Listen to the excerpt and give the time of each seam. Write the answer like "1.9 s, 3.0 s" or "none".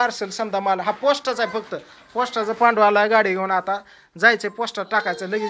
none

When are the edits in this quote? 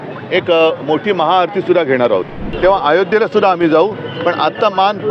2.4 s

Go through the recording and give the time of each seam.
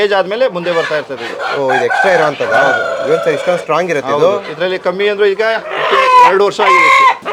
none

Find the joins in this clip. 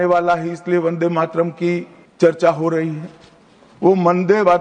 2.0 s

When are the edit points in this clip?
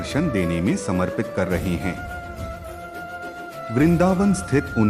2.0 s, 3.6 s

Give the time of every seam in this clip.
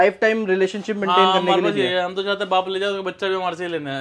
none

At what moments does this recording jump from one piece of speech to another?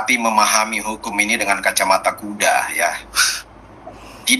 none

